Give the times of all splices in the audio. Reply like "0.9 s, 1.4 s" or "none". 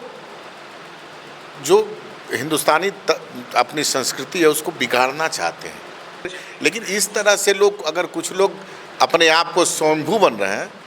6.4 s